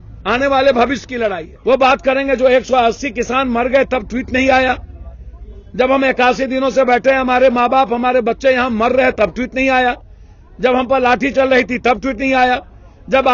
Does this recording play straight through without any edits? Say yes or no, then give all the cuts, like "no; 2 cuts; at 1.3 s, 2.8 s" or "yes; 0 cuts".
no; 1 cut; at 1.5 s